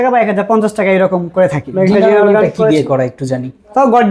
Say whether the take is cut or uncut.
cut